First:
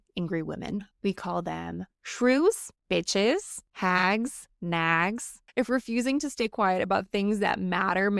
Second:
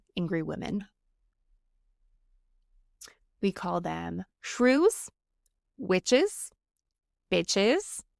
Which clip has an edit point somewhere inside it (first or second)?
first